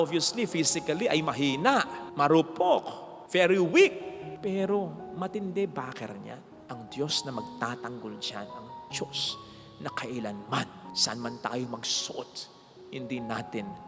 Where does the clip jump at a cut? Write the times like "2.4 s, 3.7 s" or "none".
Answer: none